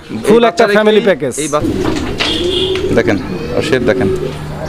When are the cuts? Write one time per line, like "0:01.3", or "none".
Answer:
0:01.6